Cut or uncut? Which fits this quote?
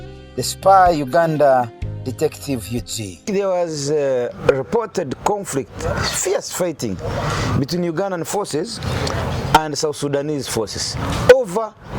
cut